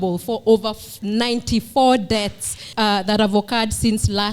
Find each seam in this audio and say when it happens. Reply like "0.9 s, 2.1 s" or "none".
2.6 s